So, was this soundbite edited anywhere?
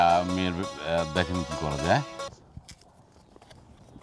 yes; 1 cut; at 2.4 s

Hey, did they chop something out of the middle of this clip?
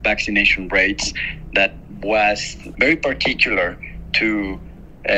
no; 0 cuts

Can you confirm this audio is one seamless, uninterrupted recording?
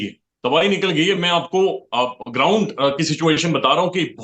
yes; 0 cuts

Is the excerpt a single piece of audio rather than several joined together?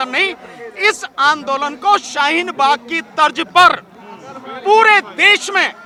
yes; 0 cuts

